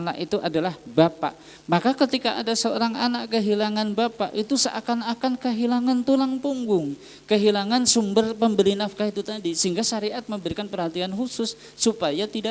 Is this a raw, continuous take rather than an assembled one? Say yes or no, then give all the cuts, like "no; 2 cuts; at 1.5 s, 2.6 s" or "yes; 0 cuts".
yes; 0 cuts